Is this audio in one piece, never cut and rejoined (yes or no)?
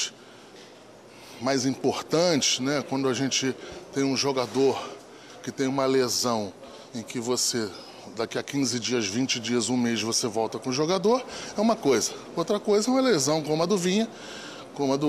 yes